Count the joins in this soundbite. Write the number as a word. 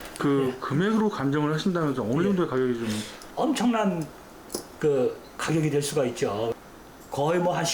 one